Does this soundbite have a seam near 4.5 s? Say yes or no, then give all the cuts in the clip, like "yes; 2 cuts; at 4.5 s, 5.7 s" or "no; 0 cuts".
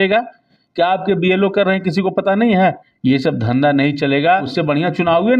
yes; 2 cuts; at 2.9 s, 4.5 s